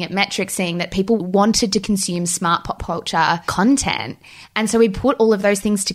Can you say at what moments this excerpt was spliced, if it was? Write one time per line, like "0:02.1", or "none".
0:01.2